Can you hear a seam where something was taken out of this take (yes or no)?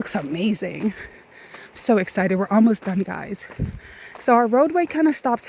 no